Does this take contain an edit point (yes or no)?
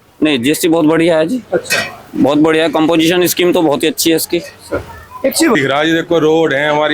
yes